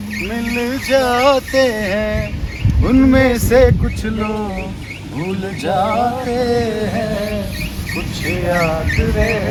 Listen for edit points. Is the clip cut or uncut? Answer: uncut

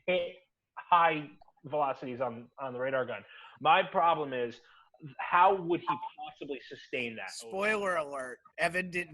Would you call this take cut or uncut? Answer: cut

